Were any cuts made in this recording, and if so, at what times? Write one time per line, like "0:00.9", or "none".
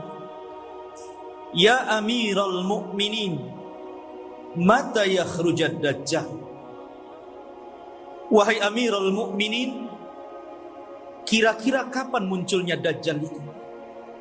none